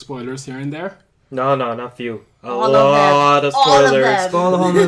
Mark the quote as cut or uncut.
uncut